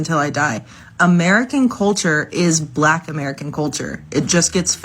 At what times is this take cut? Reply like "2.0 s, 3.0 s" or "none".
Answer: 1.3 s